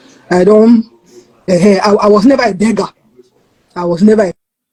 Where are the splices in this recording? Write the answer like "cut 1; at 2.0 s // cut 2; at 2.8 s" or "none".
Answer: none